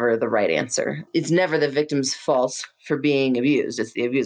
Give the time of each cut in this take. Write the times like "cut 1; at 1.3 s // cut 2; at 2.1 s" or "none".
cut 1; at 1.0 s